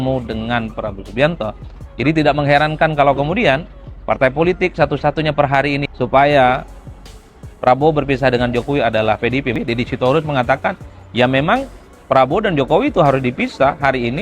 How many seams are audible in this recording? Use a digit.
2